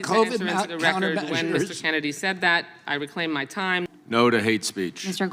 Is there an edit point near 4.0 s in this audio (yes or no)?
yes